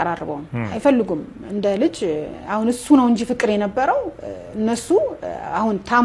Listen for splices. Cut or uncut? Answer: uncut